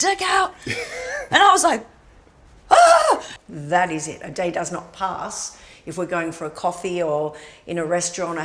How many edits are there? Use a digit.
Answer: 1